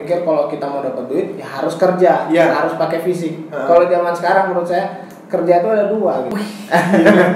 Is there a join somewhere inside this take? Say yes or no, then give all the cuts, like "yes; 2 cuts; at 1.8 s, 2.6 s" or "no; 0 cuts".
yes; 1 cut; at 6.3 s